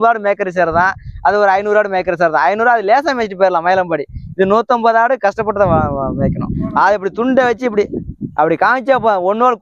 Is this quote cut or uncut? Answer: uncut